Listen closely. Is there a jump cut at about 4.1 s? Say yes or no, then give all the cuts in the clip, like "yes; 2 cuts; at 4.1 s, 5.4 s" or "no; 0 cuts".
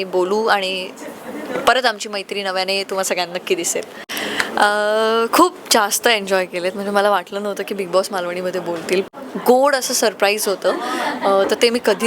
yes; 2 cuts; at 4.1 s, 9.1 s